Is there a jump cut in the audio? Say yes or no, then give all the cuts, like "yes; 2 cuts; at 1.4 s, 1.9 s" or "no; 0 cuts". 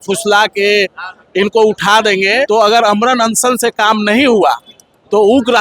yes; 1 cut; at 2.5 s